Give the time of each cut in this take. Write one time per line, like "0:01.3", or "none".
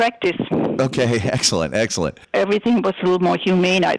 0:02.2